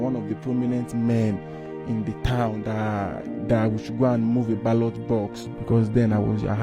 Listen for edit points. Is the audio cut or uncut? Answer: cut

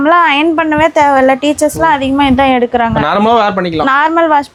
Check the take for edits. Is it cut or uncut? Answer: uncut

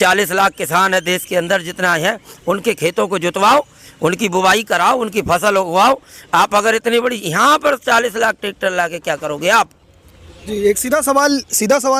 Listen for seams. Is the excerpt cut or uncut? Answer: uncut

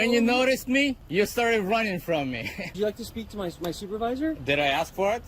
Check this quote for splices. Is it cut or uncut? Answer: cut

